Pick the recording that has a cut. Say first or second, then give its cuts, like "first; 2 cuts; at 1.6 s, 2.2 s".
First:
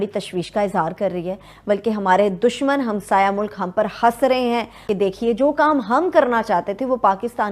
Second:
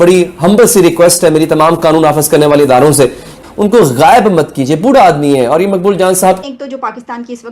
second; 2 cuts; at 3.4 s, 6.4 s